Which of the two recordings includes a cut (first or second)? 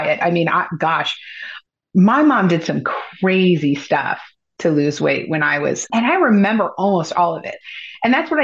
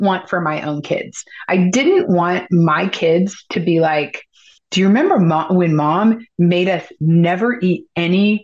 first